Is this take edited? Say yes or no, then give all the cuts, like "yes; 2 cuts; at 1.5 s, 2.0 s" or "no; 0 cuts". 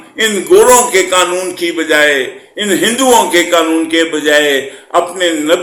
no; 0 cuts